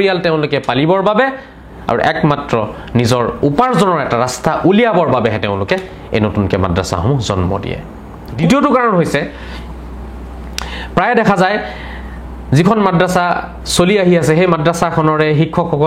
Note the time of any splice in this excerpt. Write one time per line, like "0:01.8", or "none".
none

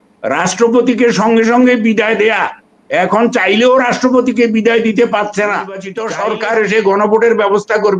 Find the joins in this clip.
0:06.0

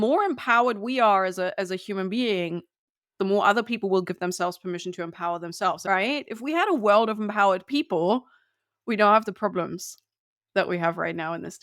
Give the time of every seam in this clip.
0:05.8

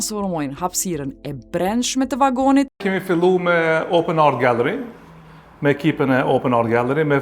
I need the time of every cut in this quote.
0:02.8

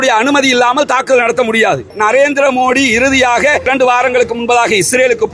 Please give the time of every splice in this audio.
0:01.9
0:03.7

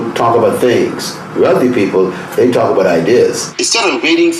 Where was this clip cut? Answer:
0:03.5

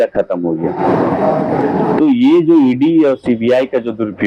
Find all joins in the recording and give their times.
none

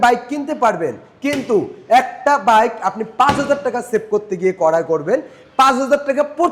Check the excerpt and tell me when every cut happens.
none

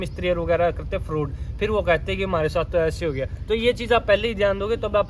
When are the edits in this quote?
none

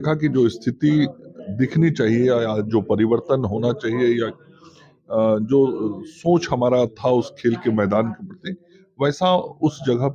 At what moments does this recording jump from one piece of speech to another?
none

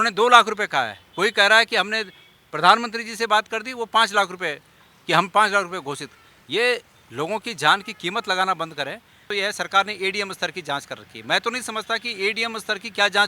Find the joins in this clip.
0:09.3

